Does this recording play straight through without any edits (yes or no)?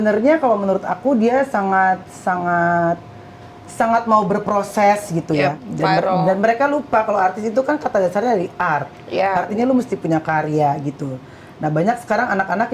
no